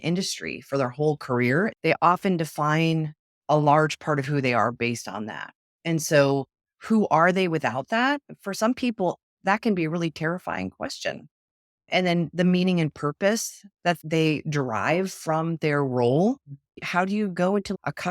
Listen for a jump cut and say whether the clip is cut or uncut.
cut